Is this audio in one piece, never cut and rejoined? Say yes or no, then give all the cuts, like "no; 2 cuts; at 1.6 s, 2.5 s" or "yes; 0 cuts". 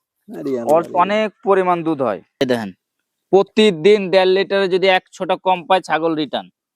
no; 1 cut; at 2.4 s